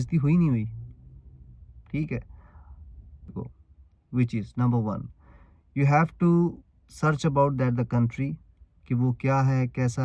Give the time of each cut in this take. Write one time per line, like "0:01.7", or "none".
0:03.5